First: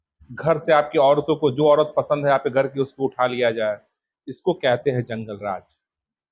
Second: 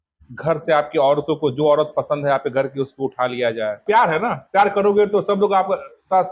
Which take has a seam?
second; 1 cut; at 3.8 s

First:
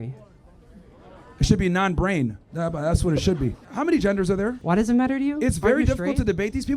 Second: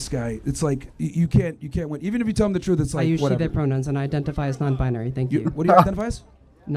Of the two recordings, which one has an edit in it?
first; 2 cuts; at 3.6 s, 4.6 s

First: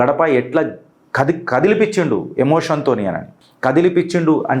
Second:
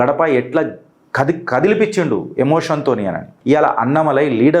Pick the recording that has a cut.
second; 1 cut; at 3.3 s

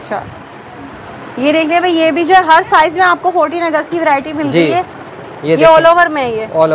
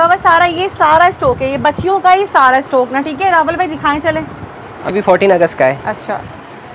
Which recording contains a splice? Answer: second; 1 cut; at 4.9 s

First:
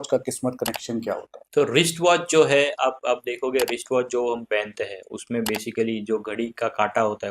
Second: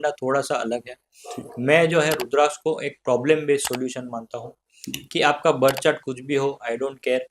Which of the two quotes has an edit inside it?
first; 1 cut; at 1.4 s

